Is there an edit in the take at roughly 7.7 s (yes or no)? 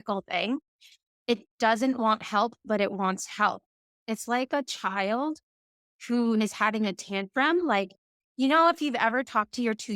no